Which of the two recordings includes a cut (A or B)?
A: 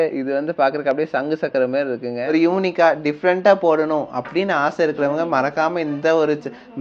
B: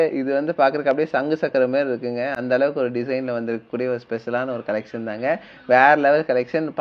A